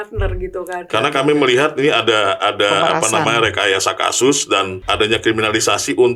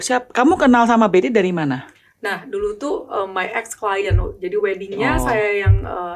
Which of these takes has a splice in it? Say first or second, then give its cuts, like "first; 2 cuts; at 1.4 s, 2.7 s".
first; 2 cuts; at 0.9 s, 4.8 s